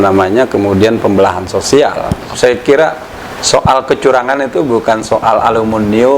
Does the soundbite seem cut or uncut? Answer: cut